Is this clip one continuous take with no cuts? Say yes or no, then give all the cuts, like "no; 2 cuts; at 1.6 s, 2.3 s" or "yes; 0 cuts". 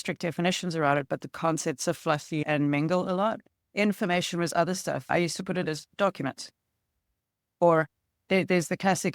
yes; 0 cuts